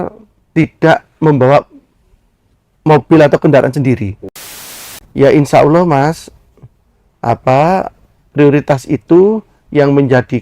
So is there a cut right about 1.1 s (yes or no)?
no